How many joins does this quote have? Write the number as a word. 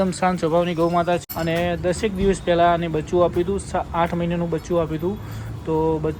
one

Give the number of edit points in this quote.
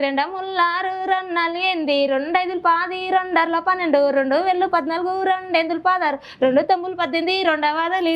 zero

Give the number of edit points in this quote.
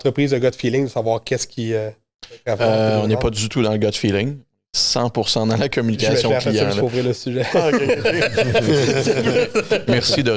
zero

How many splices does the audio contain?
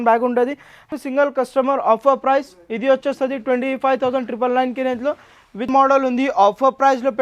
two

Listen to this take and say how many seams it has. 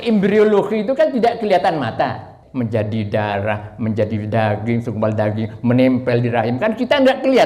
one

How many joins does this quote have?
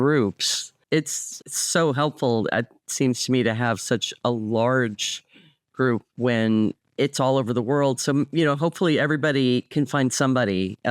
two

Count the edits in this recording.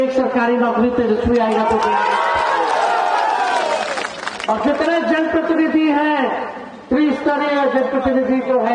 zero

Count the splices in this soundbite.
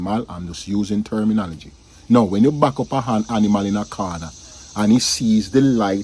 zero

